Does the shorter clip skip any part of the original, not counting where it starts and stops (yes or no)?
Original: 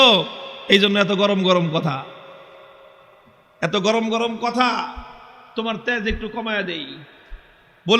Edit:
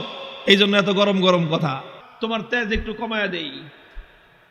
yes